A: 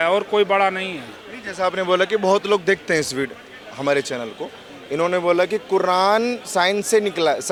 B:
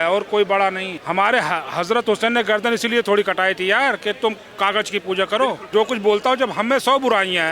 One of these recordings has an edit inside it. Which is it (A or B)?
B